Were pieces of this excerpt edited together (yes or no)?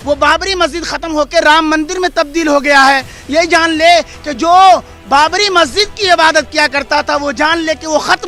no